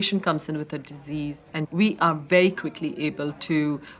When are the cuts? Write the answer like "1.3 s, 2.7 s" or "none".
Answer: 1.5 s

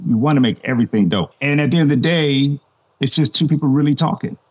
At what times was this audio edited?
1.3 s

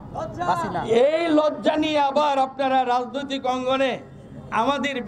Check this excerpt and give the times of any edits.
none

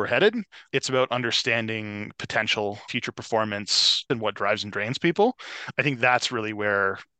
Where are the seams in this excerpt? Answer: 2.9 s, 4.0 s

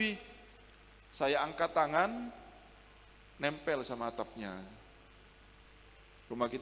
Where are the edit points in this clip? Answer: 5.7 s

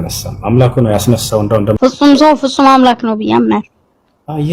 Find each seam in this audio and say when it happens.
1.8 s

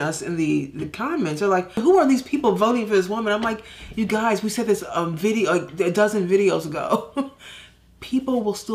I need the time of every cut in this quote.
1.8 s

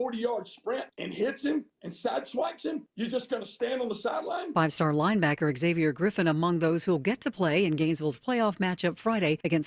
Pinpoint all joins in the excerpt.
1.5 s, 2.8 s

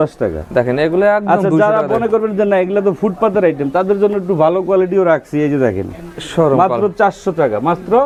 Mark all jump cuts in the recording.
none

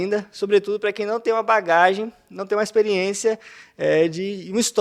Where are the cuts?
none

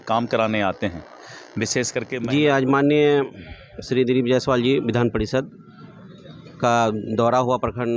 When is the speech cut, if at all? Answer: 2.1 s

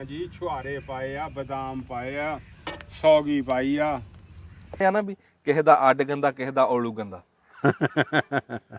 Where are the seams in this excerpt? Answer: 4.8 s

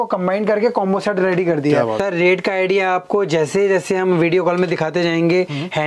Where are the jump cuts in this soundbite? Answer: 2.0 s

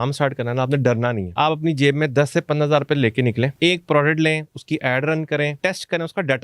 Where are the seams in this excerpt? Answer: 1.2 s, 3.5 s, 5.5 s

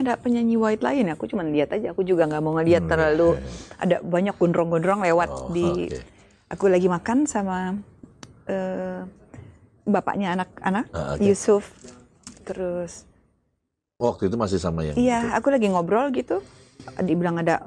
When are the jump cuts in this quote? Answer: none

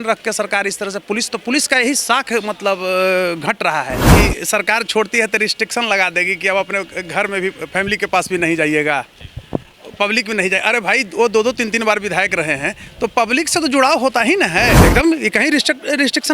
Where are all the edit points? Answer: 4.1 s, 14.8 s

